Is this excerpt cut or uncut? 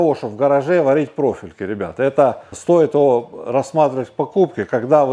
uncut